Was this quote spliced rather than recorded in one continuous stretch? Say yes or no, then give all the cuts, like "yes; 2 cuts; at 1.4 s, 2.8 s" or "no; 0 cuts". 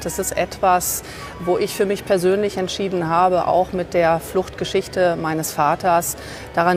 no; 0 cuts